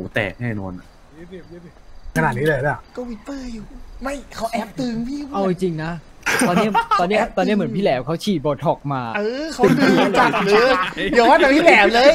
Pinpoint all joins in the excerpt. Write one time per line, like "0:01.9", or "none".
0:02.1